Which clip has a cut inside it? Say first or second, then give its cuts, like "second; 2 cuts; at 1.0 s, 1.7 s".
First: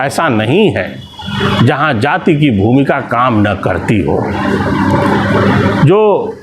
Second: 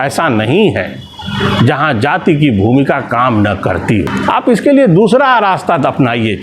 second; 1 cut; at 4.1 s